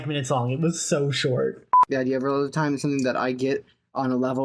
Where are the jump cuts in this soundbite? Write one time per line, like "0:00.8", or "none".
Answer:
0:01.8